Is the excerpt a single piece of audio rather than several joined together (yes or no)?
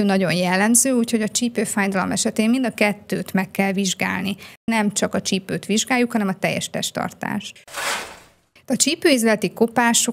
no